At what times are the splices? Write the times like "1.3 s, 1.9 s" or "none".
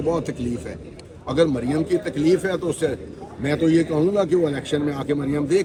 none